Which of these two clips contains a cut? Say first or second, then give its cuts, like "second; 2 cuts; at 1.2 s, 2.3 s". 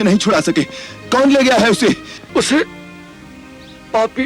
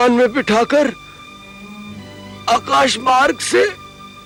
first; 1 cut; at 2.1 s